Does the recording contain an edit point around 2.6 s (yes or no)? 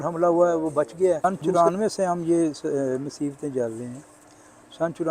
no